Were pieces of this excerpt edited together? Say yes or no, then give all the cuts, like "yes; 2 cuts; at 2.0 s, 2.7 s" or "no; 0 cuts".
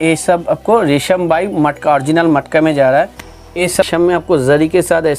yes; 1 cut; at 3.9 s